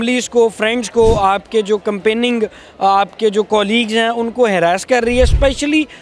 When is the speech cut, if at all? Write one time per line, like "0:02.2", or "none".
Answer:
none